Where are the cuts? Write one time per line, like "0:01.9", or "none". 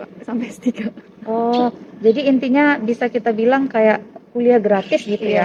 none